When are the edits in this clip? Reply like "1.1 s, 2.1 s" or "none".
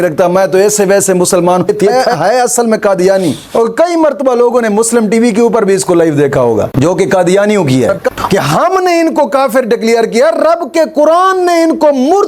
1.8 s, 3.4 s, 8.0 s